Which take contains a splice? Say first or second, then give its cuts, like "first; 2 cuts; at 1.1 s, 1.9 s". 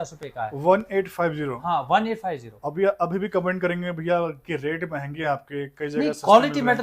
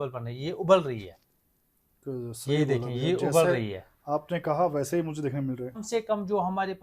second; 1 cut; at 5.8 s